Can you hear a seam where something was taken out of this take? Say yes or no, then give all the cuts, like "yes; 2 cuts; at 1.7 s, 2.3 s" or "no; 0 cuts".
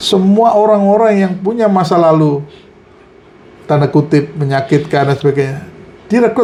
no; 0 cuts